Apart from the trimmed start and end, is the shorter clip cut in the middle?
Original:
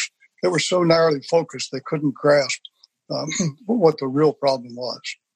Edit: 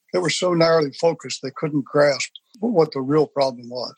yes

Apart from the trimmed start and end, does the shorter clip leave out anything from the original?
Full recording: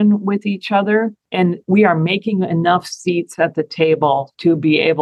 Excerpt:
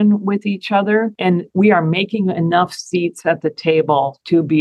yes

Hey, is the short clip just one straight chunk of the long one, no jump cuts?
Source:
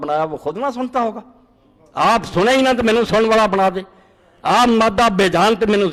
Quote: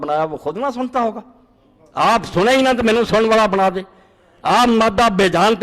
yes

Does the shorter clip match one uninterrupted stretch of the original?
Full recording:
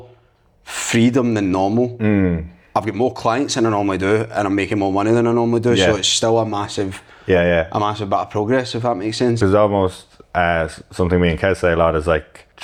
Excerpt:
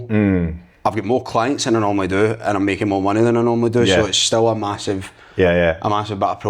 yes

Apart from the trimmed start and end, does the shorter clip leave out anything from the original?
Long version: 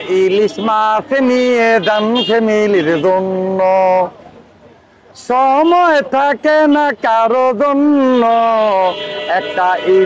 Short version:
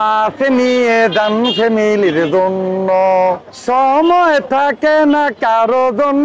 yes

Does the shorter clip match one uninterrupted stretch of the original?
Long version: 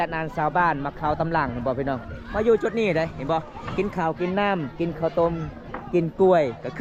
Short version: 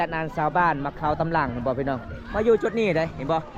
yes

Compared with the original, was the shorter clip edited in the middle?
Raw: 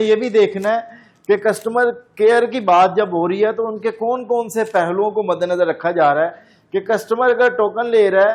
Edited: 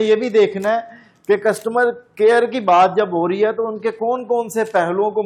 no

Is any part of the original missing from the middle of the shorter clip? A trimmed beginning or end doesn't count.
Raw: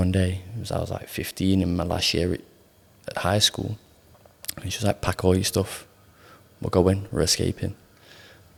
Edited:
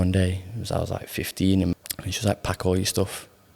yes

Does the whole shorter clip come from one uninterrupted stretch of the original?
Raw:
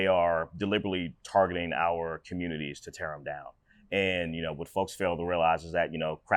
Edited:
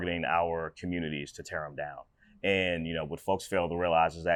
yes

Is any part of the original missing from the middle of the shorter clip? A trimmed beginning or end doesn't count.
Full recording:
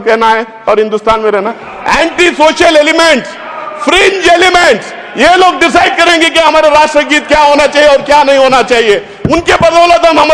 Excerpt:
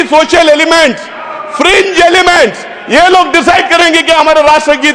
no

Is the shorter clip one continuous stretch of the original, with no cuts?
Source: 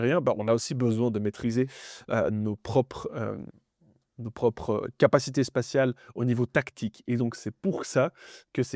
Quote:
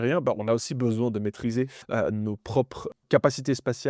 no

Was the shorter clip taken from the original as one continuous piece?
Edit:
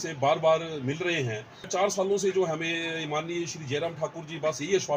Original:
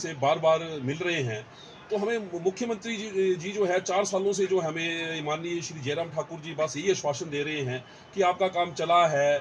no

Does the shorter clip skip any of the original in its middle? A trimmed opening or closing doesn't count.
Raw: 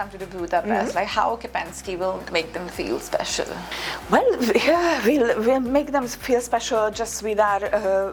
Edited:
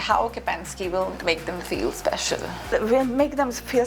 yes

